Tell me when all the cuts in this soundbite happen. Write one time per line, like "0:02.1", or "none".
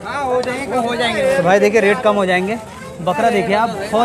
none